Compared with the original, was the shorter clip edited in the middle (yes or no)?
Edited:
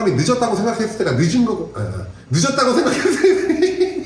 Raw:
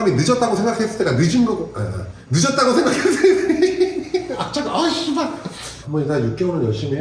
no